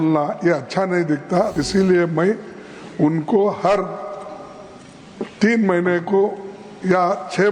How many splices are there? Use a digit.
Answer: 1